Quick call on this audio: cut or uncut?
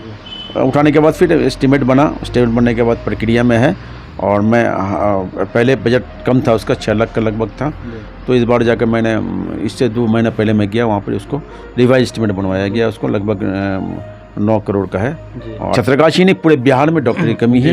cut